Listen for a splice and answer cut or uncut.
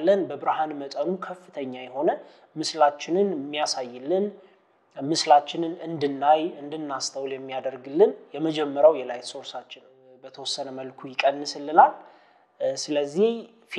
cut